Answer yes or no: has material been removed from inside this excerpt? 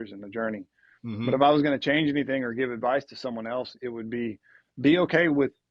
no